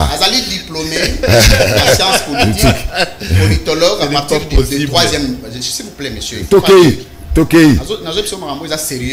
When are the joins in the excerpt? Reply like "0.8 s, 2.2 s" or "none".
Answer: none